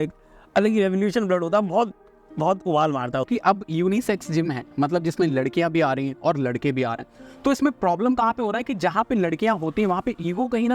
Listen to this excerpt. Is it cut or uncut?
cut